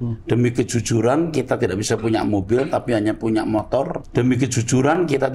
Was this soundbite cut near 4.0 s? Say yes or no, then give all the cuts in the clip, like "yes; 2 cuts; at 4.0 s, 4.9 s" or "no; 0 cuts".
yes; 1 cut; at 4.0 s